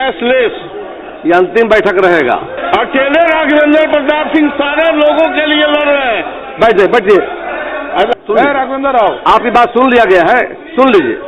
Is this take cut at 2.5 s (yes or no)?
yes